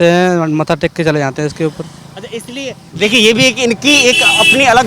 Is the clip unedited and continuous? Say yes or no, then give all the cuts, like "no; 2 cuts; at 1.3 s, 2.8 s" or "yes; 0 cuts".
yes; 0 cuts